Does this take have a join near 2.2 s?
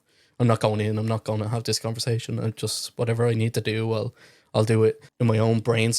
no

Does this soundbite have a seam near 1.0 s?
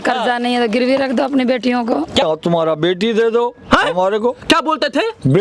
no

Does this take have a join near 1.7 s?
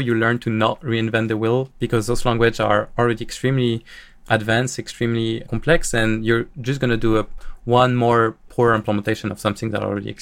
no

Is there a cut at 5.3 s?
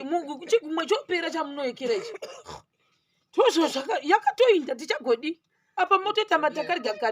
no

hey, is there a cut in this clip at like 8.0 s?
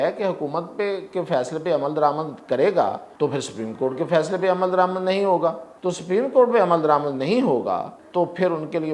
yes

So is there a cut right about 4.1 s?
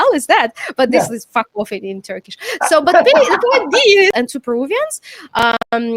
yes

